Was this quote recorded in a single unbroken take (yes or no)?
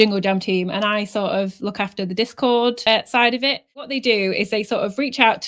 no